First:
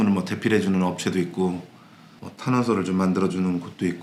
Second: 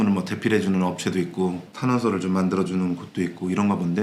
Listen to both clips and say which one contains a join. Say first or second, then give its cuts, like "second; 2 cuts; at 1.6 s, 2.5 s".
second; 1 cut; at 1.7 s